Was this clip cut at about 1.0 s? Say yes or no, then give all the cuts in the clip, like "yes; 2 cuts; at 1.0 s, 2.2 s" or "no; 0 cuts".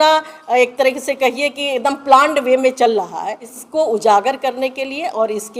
no; 1 cut; at 3.5 s